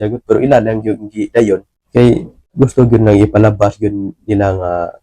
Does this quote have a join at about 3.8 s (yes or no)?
no